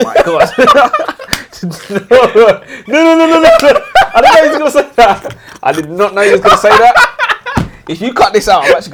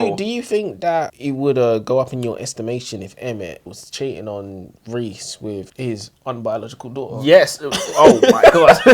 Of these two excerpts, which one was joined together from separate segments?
second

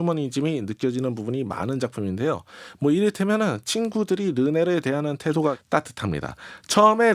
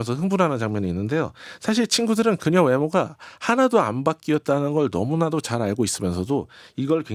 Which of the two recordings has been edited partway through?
first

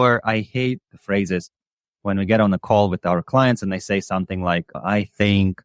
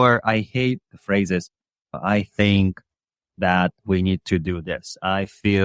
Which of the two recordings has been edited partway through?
second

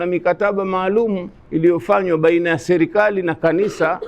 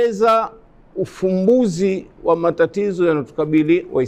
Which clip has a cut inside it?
first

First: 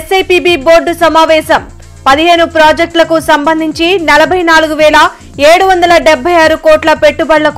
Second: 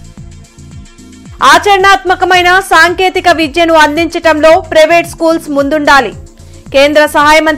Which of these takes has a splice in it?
second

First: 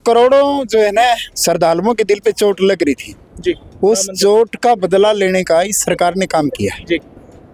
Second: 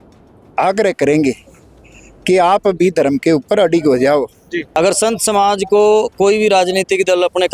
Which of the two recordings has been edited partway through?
second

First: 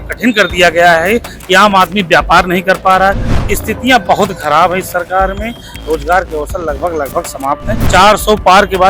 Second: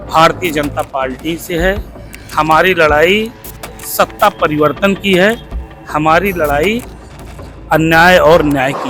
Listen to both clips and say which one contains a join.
first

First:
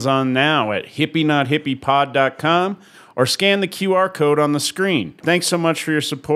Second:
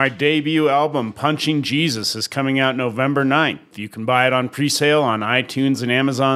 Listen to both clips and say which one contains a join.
first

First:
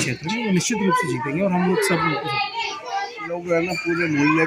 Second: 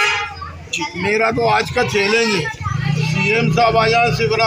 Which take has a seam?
first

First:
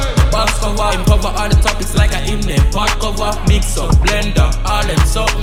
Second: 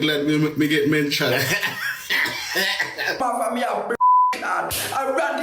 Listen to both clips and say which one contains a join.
second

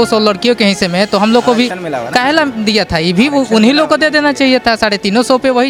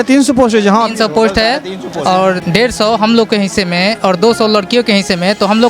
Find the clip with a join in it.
second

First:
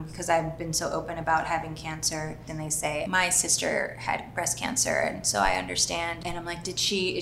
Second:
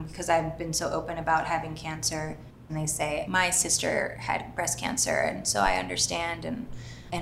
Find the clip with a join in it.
first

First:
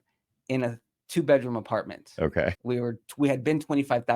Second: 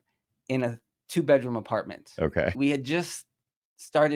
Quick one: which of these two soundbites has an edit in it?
first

